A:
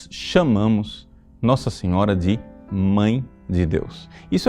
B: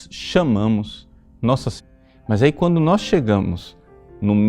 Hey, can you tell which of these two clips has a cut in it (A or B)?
A